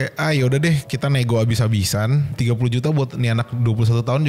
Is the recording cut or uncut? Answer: cut